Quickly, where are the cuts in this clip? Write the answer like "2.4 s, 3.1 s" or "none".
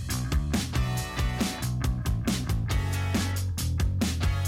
1.9 s